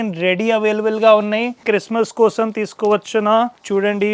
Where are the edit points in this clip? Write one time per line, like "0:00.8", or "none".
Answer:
0:01.6